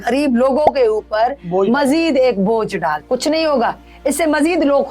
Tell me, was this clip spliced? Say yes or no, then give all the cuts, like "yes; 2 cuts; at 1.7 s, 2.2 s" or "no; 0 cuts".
yes; 1 cut; at 3.0 s